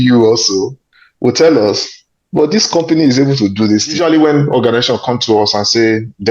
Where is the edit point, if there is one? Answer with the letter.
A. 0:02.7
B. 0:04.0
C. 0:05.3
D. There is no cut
B